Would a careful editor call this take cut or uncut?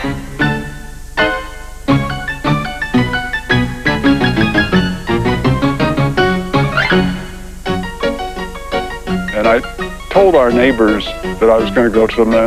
uncut